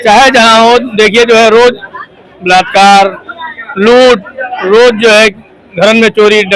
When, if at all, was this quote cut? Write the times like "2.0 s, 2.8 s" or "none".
none